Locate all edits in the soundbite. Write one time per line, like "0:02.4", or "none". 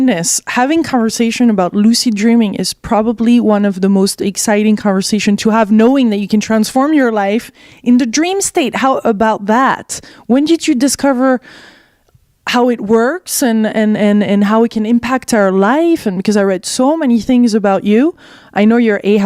0:01.3